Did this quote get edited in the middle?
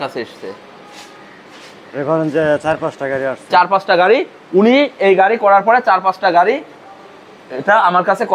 no; 0 cuts

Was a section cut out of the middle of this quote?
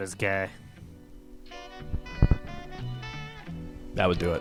no; 0 cuts

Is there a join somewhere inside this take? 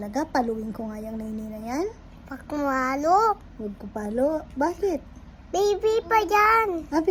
no; 0 cuts

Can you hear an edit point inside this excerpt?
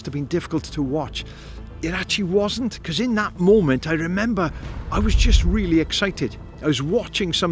no; 0 cuts

